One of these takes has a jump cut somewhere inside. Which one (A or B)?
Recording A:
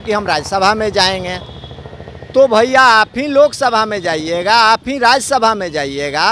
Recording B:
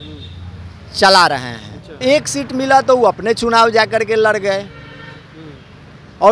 B